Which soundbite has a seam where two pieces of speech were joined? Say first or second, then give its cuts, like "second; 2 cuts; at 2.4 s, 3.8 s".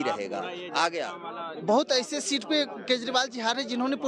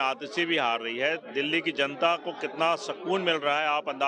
first; 1 cut; at 1.5 s